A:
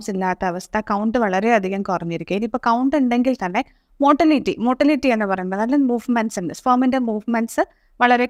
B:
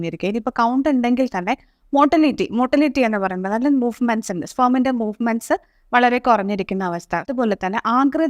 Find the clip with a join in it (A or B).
B